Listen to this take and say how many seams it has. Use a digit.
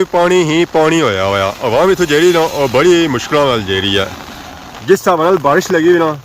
1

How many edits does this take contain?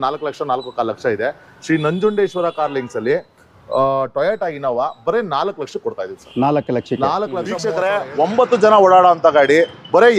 1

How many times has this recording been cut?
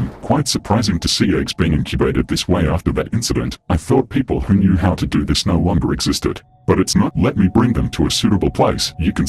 0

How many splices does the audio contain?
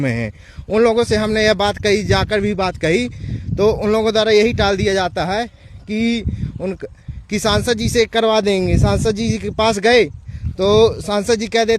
1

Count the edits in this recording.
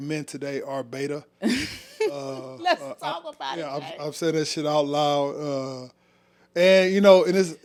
0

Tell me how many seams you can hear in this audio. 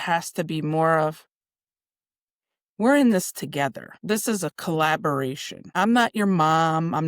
2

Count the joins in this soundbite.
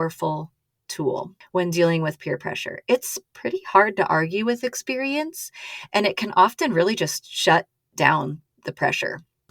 2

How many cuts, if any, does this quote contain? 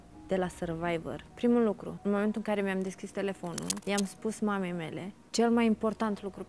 4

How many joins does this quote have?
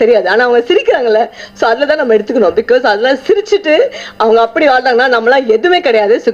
0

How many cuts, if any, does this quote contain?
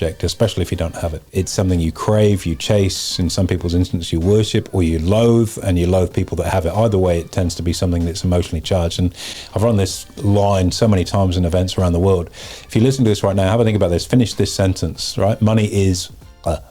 2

